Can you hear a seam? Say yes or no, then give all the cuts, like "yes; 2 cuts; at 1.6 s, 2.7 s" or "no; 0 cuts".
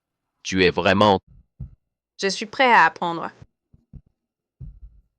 yes; 1 cut; at 1.3 s